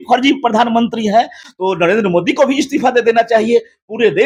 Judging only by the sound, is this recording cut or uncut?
uncut